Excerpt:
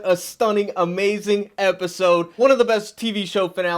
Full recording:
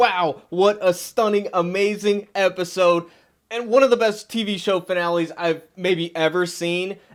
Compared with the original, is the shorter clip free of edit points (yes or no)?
no